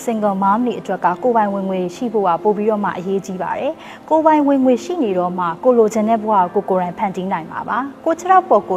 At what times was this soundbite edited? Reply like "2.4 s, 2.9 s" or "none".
none